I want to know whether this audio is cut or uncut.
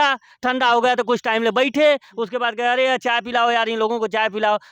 uncut